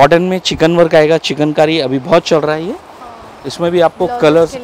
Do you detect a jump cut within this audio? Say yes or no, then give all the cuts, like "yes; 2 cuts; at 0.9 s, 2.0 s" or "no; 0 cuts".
no; 0 cuts